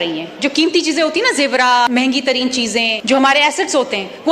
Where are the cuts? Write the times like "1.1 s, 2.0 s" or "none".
1.9 s, 2.9 s